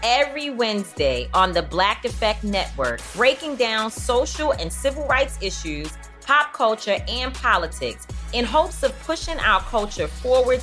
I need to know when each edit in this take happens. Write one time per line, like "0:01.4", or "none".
none